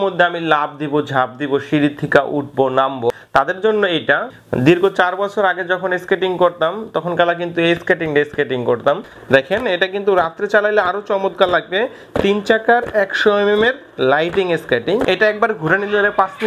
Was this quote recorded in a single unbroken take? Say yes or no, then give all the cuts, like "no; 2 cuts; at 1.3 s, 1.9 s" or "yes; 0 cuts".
no; 4 cuts; at 3.1 s, 4.4 s, 9.1 s, 15.0 s